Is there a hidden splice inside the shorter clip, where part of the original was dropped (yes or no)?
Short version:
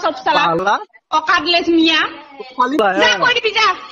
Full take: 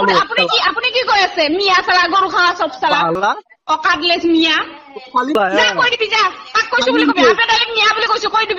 no